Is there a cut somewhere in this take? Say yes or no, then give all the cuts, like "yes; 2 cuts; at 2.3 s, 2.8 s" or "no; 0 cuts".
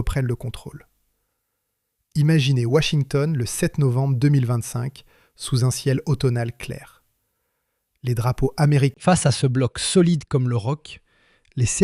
yes; 1 cut; at 9.0 s